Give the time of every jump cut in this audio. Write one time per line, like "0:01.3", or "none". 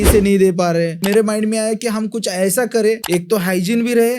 0:01.0
0:03.0